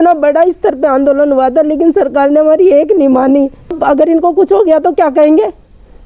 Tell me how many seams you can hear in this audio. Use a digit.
1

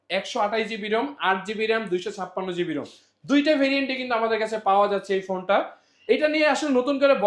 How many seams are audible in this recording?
0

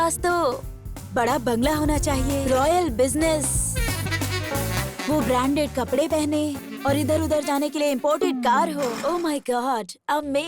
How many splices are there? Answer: 3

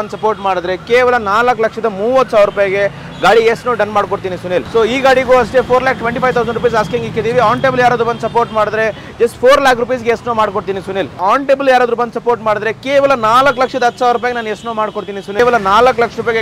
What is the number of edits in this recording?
3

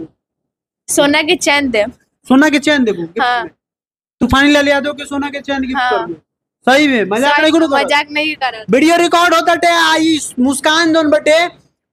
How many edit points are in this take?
0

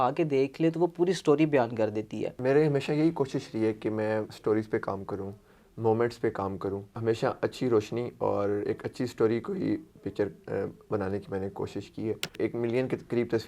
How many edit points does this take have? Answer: 3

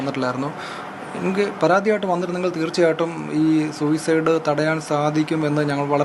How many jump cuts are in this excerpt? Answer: 0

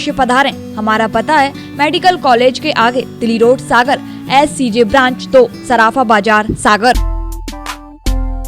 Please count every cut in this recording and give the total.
1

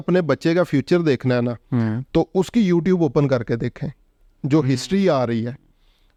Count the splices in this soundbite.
0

